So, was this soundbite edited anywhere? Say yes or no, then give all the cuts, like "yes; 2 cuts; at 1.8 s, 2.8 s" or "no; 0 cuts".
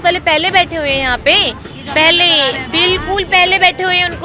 no; 0 cuts